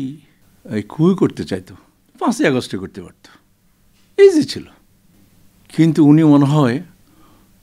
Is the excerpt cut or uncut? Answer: uncut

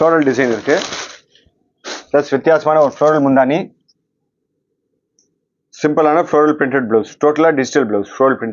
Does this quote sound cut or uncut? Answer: uncut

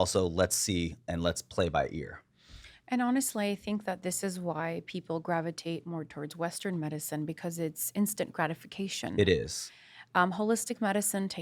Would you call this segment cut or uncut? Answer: uncut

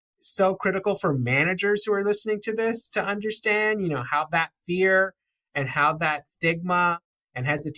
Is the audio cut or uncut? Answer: uncut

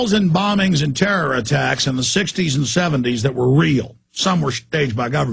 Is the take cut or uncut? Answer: cut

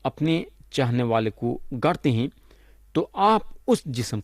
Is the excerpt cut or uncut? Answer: uncut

